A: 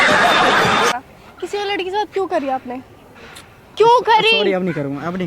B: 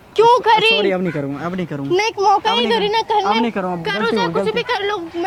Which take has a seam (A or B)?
A